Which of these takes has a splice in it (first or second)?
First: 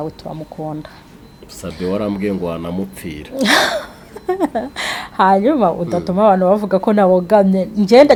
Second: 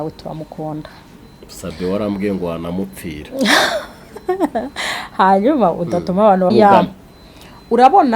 second